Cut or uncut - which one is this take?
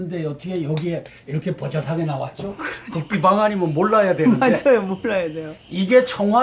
cut